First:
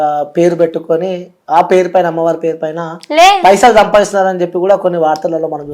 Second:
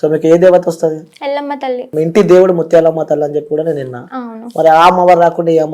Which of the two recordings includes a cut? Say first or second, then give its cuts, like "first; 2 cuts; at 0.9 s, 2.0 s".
second; 1 cut; at 1.9 s